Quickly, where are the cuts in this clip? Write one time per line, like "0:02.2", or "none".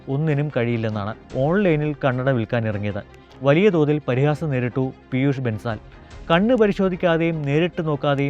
0:01.3